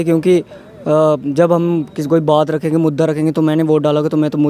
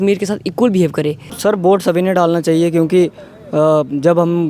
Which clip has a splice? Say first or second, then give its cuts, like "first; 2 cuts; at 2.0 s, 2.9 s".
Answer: second; 1 cut; at 1.3 s